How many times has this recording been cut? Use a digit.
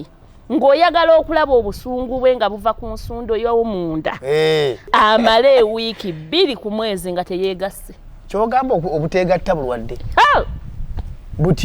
1